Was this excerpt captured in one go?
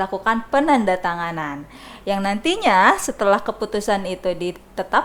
yes; 0 cuts

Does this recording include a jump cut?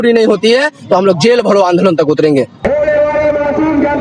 yes; 1 cut; at 2.6 s

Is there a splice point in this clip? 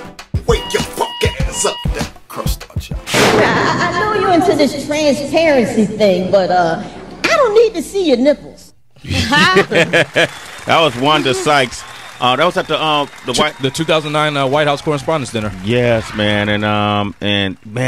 no; 0 cuts

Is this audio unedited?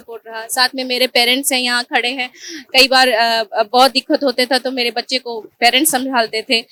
yes; 0 cuts

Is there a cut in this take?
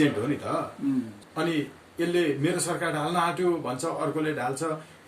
yes; 1 cut; at 1.2 s

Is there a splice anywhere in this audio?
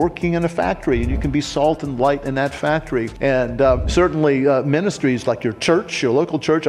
yes; 1 cut; at 3.9 s

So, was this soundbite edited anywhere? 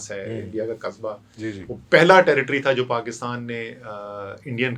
no; 0 cuts

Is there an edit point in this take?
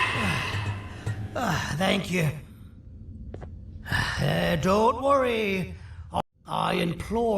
yes; 1 cut; at 6.2 s

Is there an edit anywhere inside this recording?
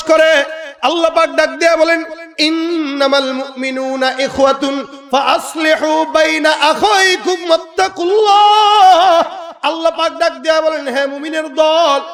no; 0 cuts

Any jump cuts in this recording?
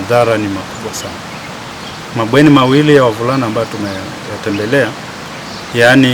no; 0 cuts

